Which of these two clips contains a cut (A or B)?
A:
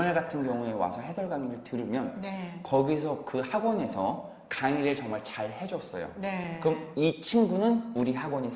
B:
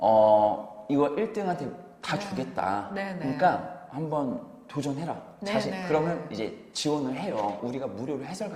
B